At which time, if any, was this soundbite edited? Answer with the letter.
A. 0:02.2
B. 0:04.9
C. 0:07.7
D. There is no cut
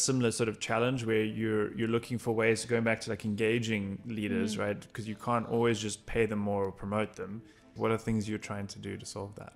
C